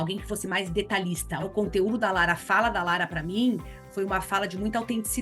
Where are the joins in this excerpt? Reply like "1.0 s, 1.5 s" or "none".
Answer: 1.5 s